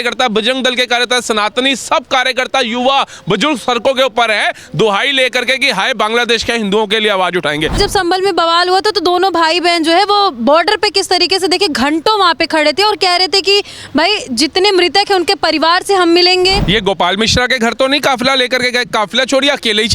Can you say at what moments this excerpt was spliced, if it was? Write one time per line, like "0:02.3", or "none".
0:07.8
0:16.6